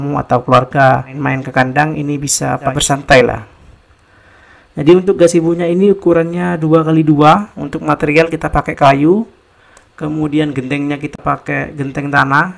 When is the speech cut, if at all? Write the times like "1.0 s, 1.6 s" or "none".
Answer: 1.1 s, 2.7 s